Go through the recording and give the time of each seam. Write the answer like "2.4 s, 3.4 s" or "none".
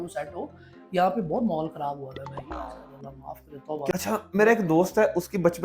3.9 s